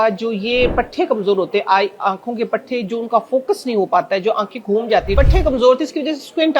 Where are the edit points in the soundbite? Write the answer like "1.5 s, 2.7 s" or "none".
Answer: 5.2 s